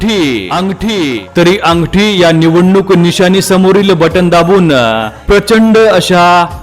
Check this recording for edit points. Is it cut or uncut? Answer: cut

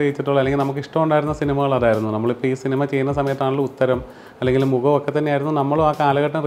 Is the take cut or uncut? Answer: uncut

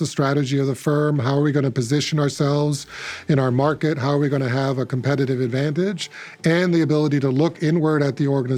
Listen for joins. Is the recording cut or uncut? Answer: uncut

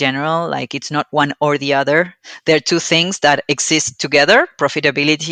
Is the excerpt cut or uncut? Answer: uncut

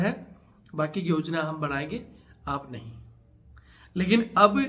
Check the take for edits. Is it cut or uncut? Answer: uncut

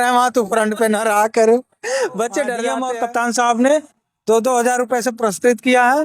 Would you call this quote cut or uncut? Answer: cut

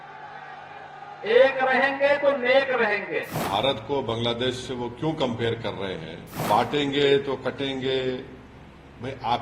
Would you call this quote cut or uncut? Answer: cut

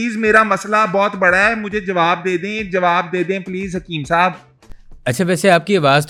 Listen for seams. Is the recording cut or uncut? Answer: uncut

